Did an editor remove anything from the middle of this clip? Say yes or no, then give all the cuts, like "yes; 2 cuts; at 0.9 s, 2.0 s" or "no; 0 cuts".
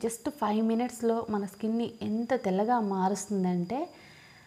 no; 0 cuts